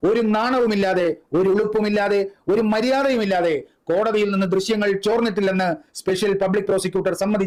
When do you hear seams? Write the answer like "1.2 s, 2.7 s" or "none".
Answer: none